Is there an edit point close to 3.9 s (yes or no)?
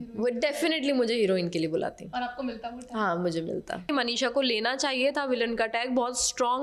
yes